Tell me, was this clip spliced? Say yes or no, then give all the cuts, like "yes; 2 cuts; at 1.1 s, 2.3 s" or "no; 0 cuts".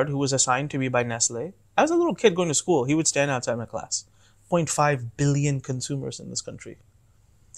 yes; 1 cut; at 4.4 s